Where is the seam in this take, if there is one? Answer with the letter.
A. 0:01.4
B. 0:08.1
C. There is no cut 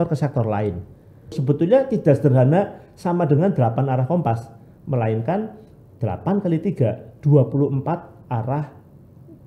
A